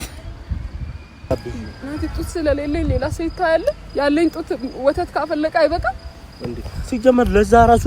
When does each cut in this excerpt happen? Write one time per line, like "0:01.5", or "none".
0:01.3